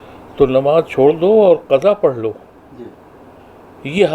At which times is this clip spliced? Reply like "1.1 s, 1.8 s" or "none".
none